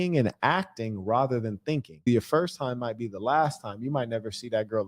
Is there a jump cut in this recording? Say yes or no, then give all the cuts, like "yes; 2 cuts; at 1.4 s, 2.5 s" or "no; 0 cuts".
yes; 1 cut; at 2.1 s